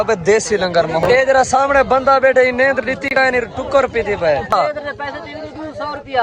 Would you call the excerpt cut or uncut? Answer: cut